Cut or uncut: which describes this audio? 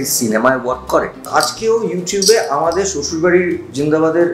cut